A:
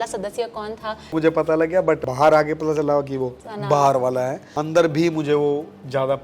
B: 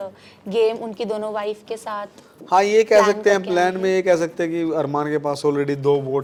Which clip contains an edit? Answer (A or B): A